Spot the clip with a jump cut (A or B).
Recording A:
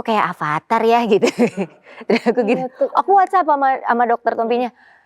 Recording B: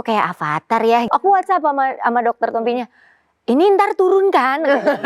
B